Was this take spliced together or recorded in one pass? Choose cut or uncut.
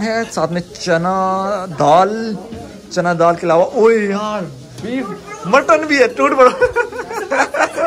uncut